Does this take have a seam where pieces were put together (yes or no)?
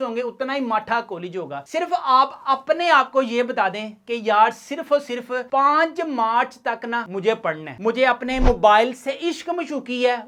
no